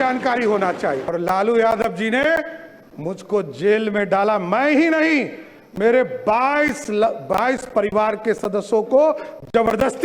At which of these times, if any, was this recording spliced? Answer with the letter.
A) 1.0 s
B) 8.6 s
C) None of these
A